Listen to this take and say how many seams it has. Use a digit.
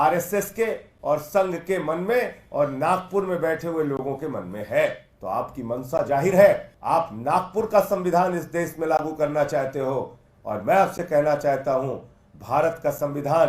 2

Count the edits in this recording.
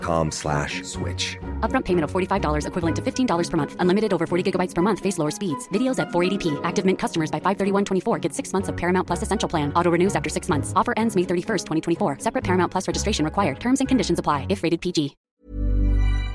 1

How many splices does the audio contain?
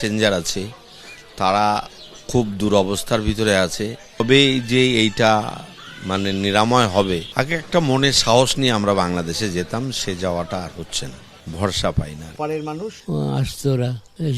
1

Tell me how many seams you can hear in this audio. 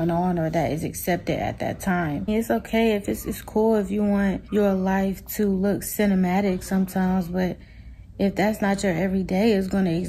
2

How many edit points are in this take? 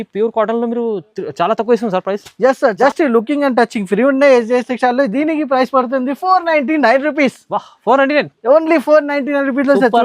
1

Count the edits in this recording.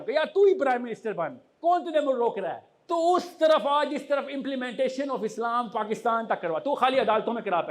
1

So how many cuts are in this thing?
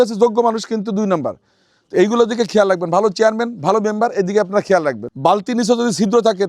1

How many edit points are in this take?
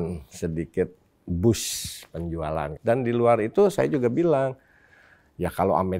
1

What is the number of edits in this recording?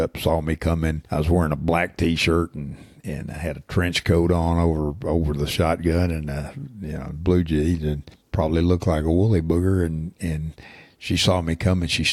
2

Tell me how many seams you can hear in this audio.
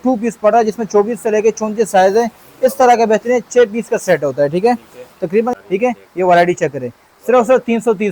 1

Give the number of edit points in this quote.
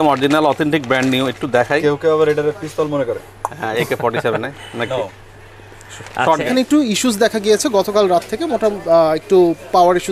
1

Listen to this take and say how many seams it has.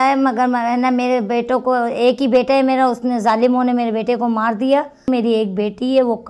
1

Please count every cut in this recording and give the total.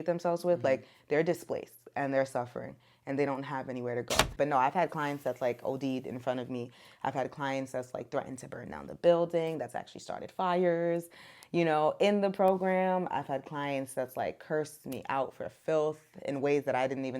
1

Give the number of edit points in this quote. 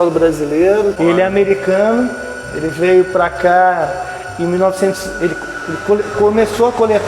1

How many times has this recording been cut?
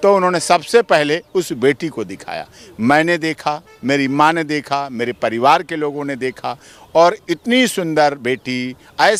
0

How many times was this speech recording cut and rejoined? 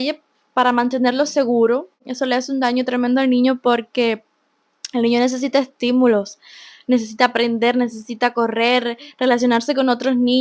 1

